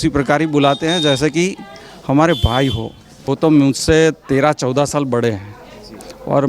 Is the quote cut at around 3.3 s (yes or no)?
yes